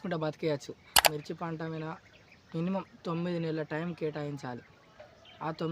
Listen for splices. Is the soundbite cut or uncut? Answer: cut